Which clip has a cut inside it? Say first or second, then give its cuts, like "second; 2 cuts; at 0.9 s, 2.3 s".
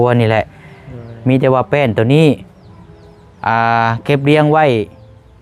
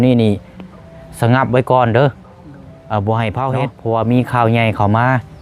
second; 1 cut; at 3.7 s